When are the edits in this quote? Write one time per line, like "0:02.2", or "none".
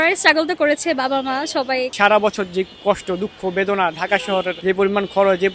0:01.9
0:04.5